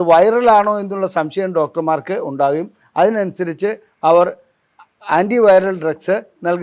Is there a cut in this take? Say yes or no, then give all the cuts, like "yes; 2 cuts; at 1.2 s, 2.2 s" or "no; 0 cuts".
no; 0 cuts